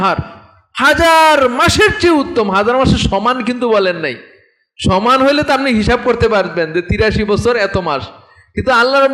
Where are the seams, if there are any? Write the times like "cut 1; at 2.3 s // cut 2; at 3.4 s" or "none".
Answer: none